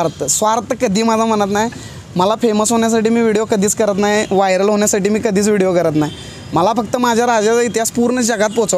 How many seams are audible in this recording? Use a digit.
0